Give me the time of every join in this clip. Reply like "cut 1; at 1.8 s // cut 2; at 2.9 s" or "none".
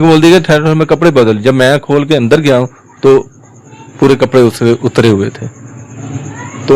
none